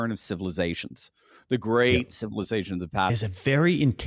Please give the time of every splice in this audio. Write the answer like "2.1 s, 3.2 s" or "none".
3.1 s